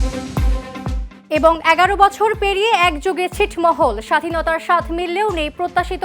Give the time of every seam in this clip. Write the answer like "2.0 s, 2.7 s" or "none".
1.1 s